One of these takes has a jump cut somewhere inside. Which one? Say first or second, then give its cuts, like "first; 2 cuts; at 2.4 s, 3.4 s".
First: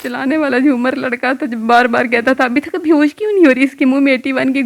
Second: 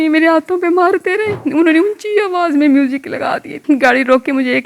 second; 2 cuts; at 1.5 s, 3.6 s